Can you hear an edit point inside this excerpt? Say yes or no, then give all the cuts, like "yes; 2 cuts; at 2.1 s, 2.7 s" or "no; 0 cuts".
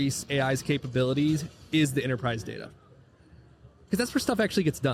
no; 0 cuts